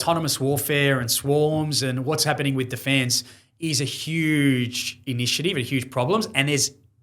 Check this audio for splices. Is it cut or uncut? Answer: uncut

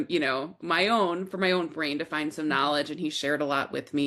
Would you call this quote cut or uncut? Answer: uncut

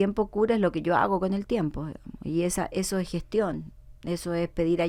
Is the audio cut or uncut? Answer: uncut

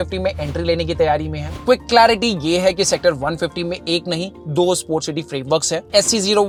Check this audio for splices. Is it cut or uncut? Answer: uncut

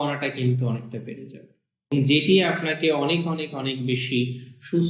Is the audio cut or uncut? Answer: cut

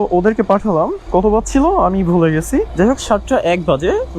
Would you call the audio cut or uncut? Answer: cut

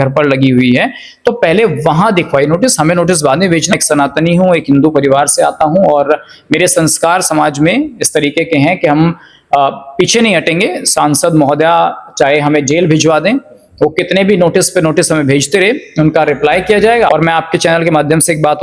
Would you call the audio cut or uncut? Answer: cut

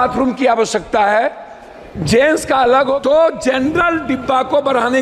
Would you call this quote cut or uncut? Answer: cut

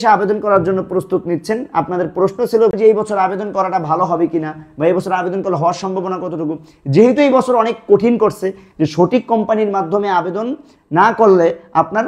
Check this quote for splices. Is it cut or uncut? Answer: cut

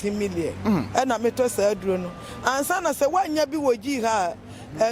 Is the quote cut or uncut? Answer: uncut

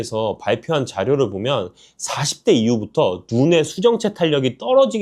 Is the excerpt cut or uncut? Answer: uncut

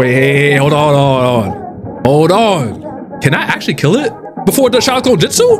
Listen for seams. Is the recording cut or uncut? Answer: cut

